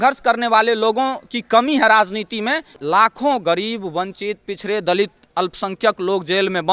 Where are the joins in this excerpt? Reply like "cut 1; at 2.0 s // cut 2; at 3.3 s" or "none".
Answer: cut 1; at 2.8 s